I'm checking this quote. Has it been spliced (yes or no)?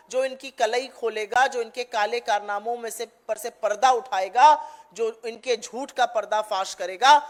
no